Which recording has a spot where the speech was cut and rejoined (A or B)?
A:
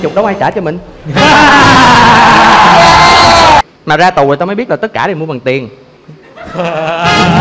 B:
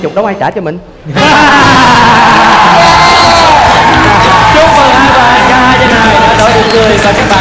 A